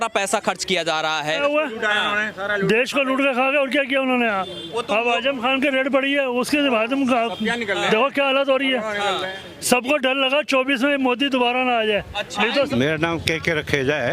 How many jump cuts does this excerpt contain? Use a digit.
2